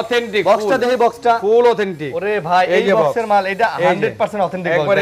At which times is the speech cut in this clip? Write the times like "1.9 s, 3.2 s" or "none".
none